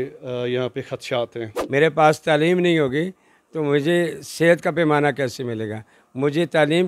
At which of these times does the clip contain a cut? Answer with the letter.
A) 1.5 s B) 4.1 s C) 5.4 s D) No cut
A